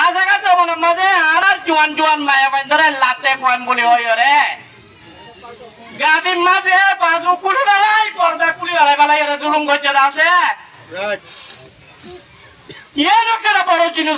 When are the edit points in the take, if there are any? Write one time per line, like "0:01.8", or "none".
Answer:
0:01.4

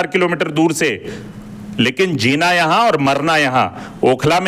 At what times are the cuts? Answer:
none

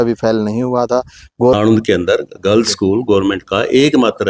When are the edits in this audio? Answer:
0:01.5

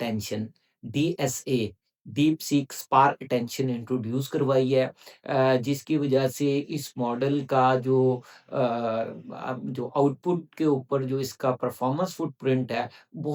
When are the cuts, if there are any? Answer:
none

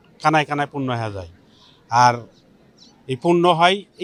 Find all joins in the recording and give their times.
none

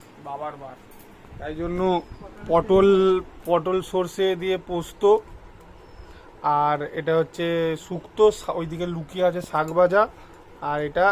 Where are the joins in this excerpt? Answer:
none

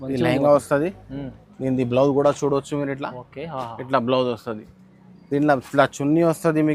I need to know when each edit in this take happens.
none

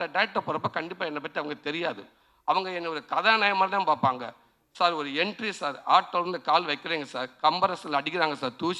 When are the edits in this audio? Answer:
none

